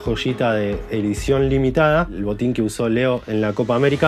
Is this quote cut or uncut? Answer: cut